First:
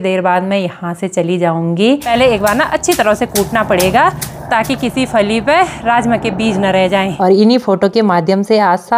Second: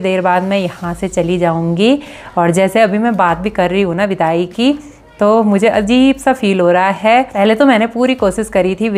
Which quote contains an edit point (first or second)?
first